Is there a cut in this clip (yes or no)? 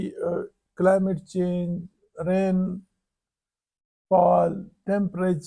no